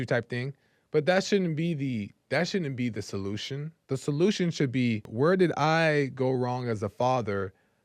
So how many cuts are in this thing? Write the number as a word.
two